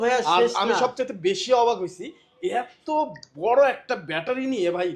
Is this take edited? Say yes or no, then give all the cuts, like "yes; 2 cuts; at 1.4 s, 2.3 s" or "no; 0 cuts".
no; 0 cuts